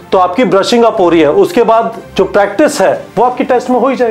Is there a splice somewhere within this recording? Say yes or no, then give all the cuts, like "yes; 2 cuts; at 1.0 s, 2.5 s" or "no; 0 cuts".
yes; 2 cuts; at 2.0 s, 3.0 s